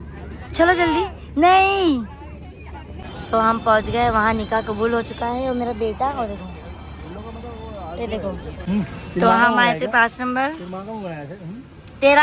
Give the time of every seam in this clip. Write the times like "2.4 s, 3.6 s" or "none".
2.9 s, 8.6 s